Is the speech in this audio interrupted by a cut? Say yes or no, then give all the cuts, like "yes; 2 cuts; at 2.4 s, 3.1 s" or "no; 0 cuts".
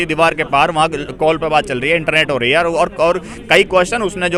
no; 0 cuts